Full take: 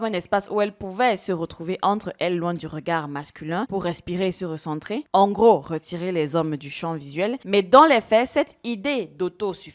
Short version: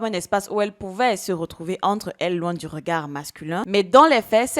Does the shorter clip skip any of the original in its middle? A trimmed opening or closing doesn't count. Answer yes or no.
yes